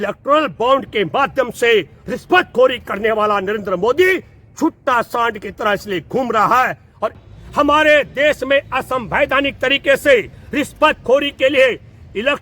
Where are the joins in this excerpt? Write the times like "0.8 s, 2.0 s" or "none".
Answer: 7.3 s